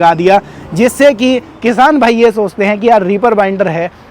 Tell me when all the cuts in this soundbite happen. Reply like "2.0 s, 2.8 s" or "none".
1.5 s

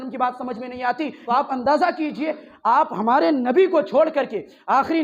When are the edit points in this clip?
1.2 s

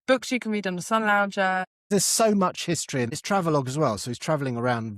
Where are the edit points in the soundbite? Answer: 1.8 s, 3.2 s

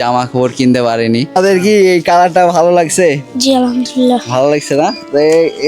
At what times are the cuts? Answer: 1.3 s

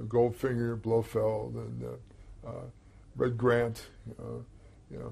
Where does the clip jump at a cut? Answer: 2.6 s

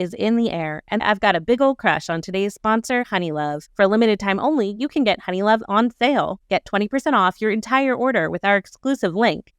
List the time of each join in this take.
1.0 s, 3.6 s

